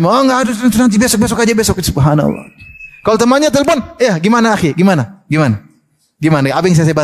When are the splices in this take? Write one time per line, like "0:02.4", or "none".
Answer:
none